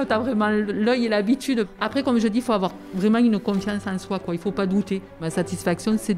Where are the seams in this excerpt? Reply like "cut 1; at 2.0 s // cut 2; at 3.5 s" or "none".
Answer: cut 1; at 1.7 s // cut 2; at 5.2 s